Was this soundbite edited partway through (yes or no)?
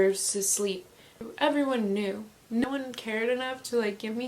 yes